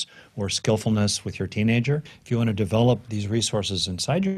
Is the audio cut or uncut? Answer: cut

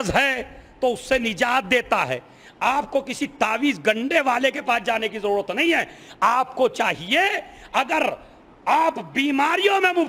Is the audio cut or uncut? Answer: uncut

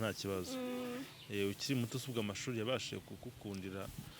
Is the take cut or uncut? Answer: uncut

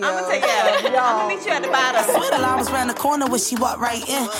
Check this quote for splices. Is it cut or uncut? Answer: cut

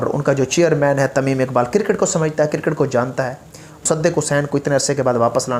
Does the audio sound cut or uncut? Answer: cut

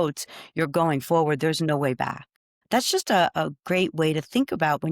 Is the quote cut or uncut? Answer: cut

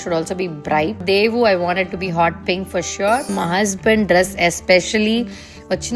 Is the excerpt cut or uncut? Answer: uncut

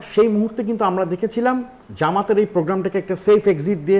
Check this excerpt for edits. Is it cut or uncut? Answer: cut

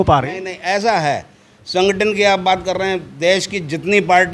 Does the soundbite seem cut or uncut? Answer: uncut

